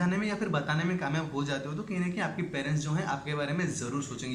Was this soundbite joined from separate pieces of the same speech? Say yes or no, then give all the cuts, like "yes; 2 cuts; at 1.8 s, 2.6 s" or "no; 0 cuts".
no; 0 cuts